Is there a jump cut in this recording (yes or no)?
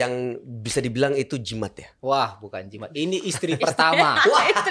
no